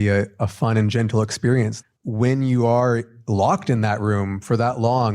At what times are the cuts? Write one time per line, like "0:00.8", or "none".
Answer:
0:01.8
0:03.2

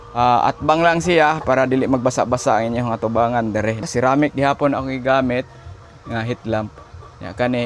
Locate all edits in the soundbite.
0:03.8

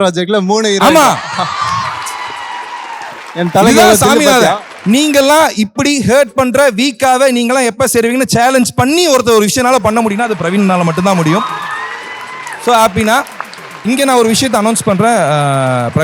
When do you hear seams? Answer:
0:04.7
0:13.8

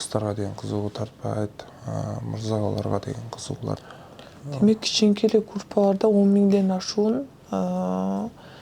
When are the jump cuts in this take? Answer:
0:03.8

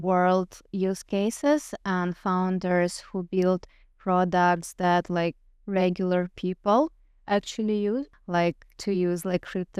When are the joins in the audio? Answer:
0:08.1

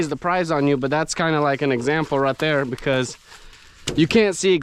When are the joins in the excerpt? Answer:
none

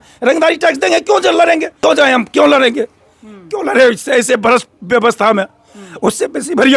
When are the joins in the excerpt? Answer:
0:01.7

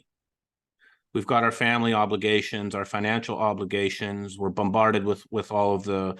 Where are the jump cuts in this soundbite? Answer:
none

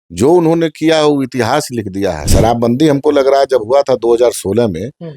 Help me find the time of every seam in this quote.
0:02.2

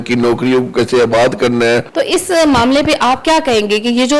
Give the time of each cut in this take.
0:01.9

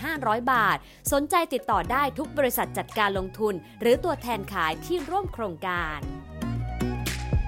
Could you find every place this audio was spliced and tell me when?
0:05.9

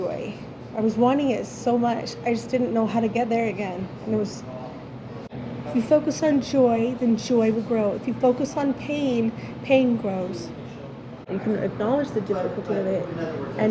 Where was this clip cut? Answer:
0:05.3
0:11.2

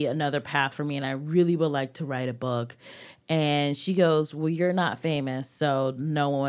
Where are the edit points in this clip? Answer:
none

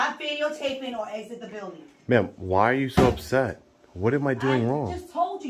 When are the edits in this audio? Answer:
none

